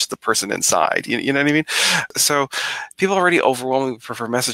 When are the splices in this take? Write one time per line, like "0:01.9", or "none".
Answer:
0:02.1